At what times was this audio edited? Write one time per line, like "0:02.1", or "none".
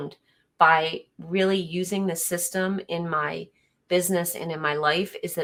none